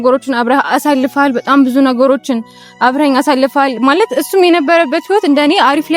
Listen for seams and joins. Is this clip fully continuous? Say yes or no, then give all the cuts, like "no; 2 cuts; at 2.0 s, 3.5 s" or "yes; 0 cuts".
yes; 0 cuts